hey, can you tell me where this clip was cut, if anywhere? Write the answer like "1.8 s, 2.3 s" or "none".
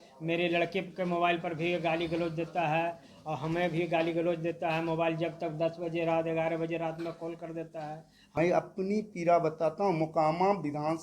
8.4 s